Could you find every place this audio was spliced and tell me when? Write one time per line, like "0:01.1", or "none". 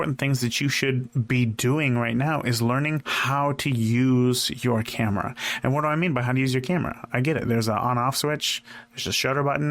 0:03.1